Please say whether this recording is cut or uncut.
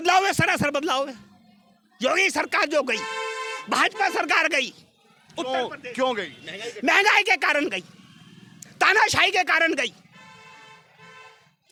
uncut